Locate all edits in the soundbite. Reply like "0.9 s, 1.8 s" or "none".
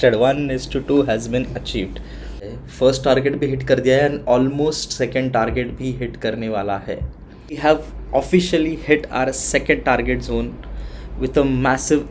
2.5 s, 7.6 s